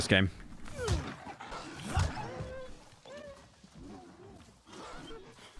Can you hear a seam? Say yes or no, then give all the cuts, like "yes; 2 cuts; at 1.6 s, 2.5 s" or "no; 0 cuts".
yes; 1 cut; at 1.5 s